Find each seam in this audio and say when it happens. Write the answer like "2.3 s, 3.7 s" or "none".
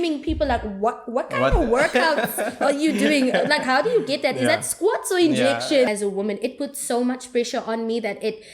5.9 s